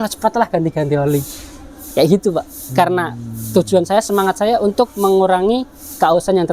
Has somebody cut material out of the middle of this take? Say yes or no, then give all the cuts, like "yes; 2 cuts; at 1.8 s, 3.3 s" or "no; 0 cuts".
no; 0 cuts